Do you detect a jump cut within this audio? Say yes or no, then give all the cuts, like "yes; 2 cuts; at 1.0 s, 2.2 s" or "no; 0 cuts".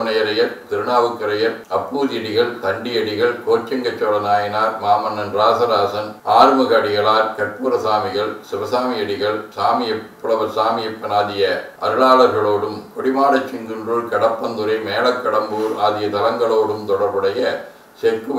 no; 0 cuts